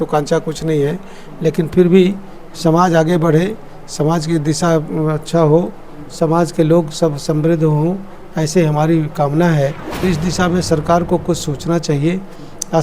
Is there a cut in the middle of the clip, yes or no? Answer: yes